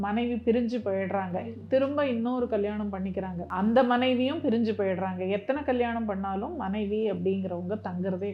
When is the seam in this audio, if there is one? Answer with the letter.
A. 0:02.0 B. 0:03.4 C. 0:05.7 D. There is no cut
B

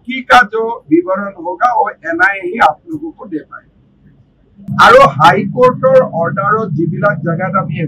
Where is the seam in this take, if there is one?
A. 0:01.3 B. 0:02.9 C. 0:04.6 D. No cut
C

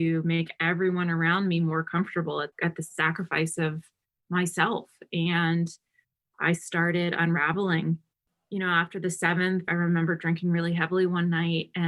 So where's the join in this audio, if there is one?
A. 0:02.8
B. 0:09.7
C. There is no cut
B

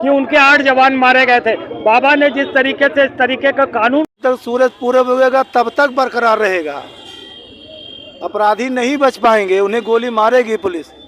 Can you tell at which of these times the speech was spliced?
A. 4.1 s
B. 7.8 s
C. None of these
A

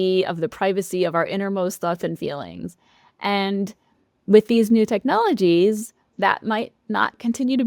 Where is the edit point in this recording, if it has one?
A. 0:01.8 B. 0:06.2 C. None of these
B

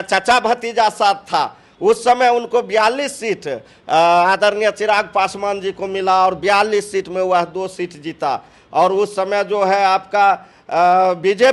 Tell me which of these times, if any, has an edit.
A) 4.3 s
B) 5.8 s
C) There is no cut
C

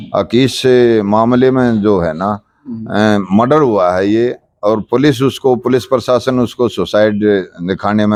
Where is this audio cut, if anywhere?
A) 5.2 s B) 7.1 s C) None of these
C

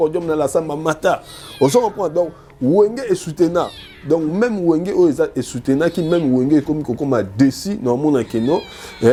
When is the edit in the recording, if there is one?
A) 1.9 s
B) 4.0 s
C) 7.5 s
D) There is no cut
D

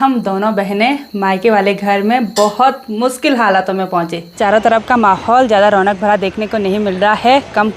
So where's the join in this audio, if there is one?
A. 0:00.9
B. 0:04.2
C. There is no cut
B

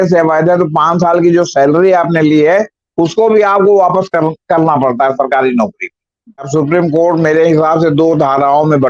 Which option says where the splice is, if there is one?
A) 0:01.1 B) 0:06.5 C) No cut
B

